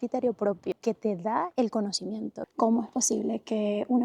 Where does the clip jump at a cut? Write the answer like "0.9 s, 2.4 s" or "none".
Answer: 0.7 s, 2.4 s